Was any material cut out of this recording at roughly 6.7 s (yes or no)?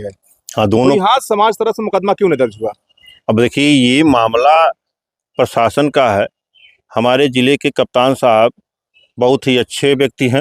no